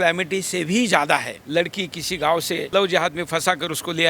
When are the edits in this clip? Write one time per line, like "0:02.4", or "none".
0:01.4
0:02.7